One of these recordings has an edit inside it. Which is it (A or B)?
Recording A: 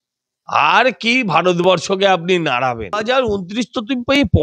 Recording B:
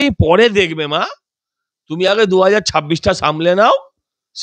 A